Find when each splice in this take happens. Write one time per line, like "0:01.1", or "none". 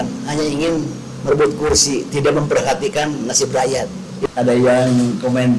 0:04.2